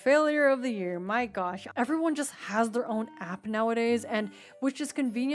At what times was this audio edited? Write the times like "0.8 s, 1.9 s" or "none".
1.6 s